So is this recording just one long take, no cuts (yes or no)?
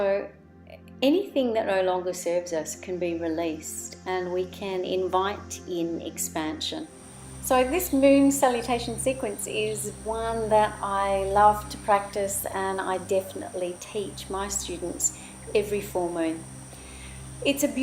no